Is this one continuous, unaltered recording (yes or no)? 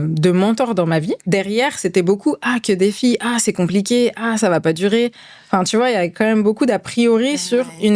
no